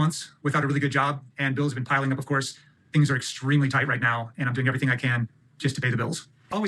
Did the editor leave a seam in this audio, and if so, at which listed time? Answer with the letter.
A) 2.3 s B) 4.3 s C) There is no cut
B